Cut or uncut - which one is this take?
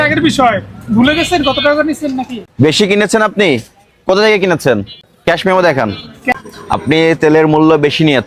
uncut